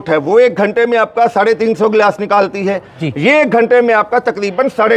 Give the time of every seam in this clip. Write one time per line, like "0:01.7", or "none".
none